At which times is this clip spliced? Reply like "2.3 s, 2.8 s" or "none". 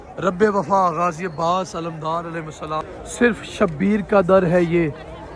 2.9 s